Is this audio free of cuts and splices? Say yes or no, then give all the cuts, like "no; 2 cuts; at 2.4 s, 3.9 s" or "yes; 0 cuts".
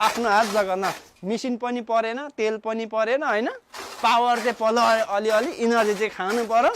no; 1 cut; at 1.0 s